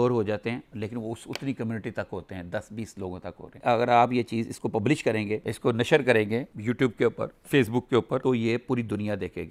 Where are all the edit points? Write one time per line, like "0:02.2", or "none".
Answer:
none